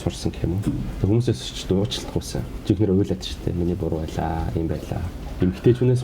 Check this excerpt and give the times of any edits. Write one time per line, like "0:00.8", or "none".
0:02.5